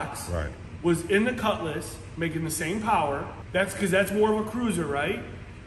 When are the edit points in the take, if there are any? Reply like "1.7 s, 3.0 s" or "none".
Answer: 3.3 s